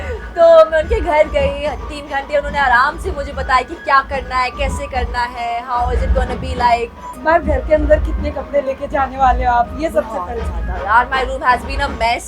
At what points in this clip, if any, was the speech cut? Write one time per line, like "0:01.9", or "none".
0:07.2